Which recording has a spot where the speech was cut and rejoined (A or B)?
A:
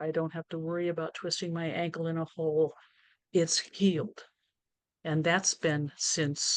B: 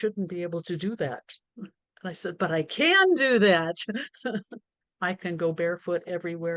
B